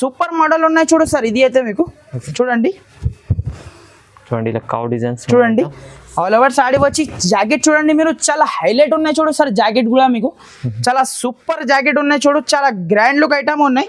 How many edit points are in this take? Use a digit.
0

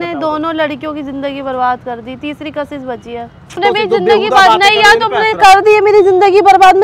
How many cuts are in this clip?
1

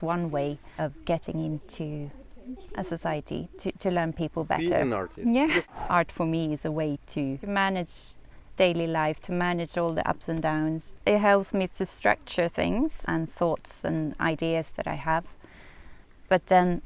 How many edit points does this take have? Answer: 4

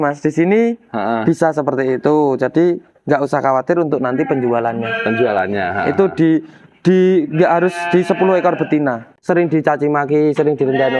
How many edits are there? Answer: 1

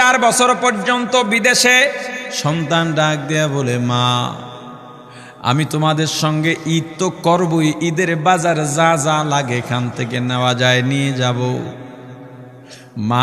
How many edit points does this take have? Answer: 1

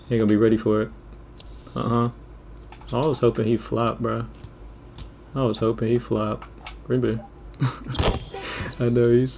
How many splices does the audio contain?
0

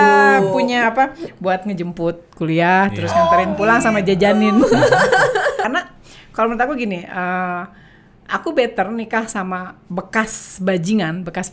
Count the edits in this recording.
1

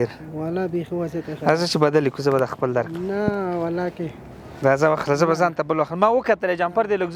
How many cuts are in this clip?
0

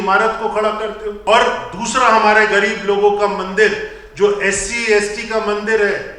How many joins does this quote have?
1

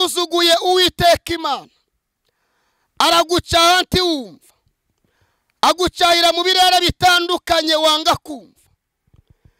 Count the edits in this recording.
0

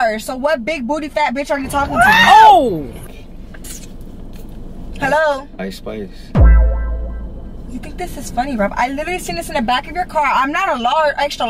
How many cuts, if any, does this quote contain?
0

